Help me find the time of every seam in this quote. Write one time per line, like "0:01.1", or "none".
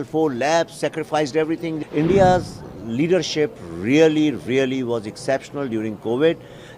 0:01.8

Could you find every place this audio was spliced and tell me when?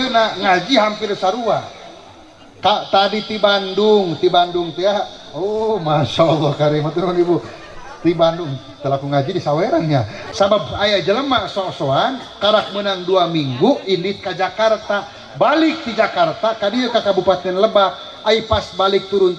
0:10.2

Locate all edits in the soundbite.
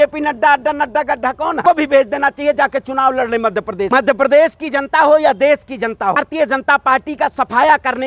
0:01.6
0:03.9
0:06.2

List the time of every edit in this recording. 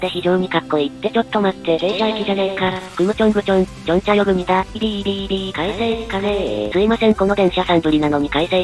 0:04.8
0:06.7

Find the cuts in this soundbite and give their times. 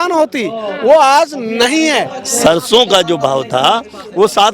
0:02.2

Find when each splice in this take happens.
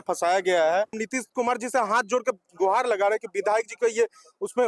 0:01.0

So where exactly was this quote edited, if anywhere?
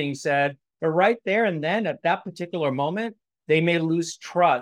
none

